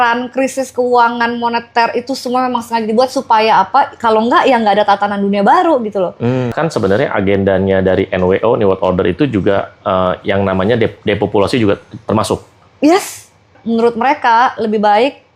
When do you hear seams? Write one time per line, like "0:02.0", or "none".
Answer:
0:06.5
0:13.6